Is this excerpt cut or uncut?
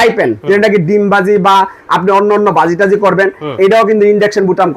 uncut